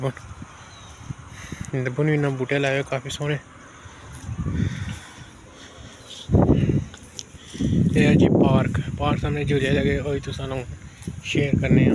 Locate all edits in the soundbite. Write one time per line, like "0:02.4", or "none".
none